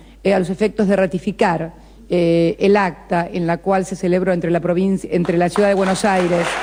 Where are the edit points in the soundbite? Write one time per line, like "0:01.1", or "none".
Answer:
none